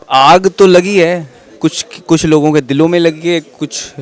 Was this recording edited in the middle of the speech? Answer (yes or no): no